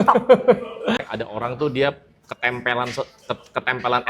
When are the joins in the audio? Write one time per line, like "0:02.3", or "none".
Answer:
0:01.1